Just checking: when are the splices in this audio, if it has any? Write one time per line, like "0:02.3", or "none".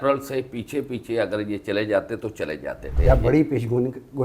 0:02.9